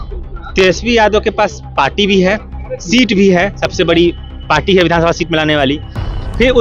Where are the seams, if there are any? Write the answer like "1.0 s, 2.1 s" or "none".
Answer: none

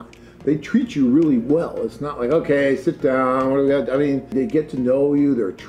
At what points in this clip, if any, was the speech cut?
4.3 s

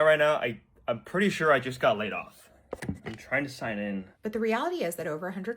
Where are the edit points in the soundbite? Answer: 4.1 s

